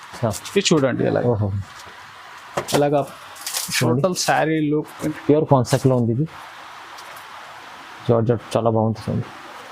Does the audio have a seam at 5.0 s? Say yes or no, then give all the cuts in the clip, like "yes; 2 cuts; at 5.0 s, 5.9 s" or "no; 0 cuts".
yes; 1 cut; at 5.0 s